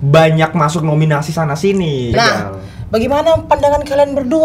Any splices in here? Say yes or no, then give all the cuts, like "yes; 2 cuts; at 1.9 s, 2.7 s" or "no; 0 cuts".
yes; 1 cut; at 2.1 s